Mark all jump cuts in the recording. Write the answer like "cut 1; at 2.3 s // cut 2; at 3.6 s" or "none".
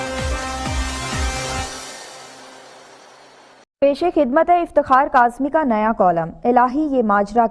cut 1; at 3.6 s